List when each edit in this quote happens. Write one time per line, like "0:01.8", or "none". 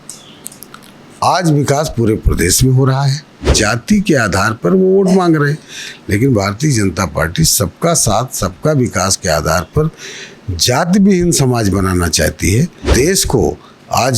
0:03.5
0:12.9